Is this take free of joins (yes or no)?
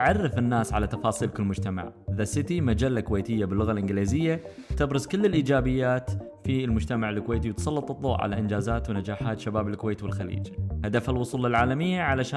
yes